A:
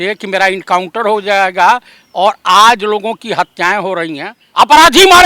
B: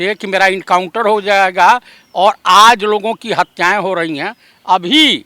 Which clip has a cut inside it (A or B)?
A